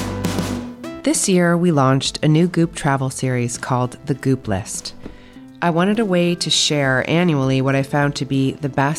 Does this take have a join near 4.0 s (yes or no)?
no